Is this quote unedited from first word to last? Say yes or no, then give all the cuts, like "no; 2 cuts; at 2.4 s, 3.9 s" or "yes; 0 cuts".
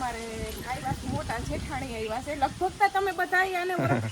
yes; 0 cuts